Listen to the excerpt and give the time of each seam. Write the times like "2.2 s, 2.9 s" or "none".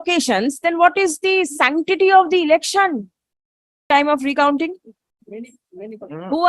3.9 s